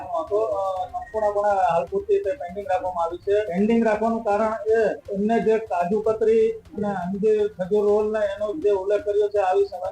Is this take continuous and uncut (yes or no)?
no